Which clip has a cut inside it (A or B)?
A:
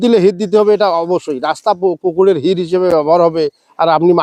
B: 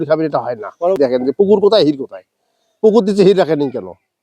B